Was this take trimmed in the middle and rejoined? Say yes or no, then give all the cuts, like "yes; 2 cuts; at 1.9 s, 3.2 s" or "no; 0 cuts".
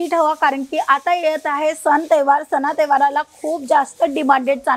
no; 0 cuts